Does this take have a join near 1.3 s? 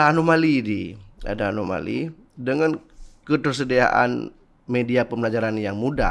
no; 0 cuts

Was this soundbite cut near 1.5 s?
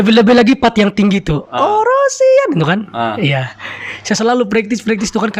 no; 1 cut; at 3.6 s

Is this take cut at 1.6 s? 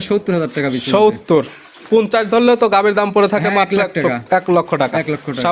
no; 0 cuts

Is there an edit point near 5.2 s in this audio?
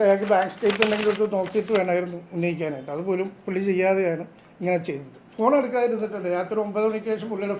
yes; 1 cut; at 5.2 s

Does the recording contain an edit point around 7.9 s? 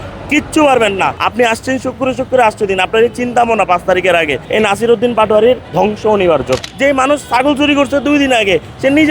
no; 4 cuts; at 1.2 s, 4.4 s, 5.7 s, 6.6 s

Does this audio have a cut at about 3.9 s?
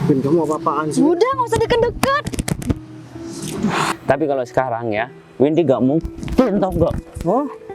yes; 1 cut; at 3.9 s

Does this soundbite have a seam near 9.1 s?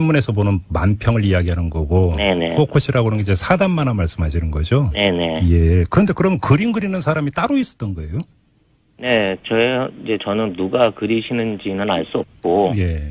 no; 1 cut; at 1.4 s

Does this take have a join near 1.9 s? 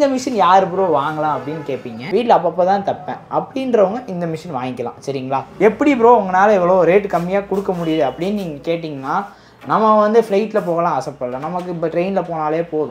yes; 2 cuts; at 1.9 s, 5.5 s

